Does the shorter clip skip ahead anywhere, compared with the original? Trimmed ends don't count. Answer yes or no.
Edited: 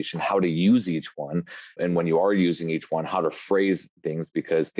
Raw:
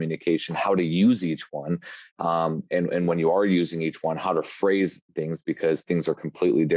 yes